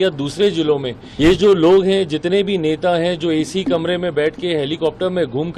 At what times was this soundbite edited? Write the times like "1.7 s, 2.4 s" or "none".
1.0 s